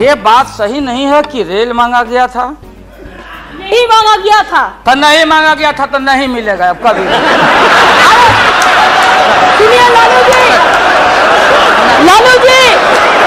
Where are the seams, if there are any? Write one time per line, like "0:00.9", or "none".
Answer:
none